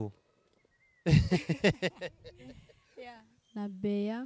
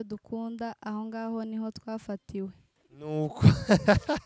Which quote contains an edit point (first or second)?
first